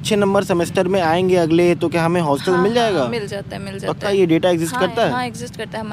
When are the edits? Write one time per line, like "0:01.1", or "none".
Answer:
none